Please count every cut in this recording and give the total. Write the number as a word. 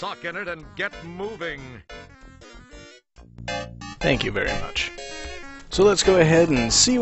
one